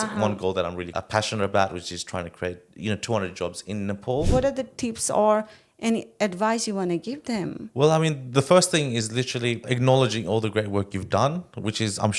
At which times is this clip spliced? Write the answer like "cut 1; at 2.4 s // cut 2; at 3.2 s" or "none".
cut 1; at 0.9 s // cut 2; at 4.3 s // cut 3; at 9.6 s